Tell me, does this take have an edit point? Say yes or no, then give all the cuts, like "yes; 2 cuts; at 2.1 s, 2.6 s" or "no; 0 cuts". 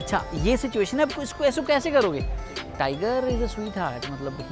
yes; 1 cut; at 2.7 s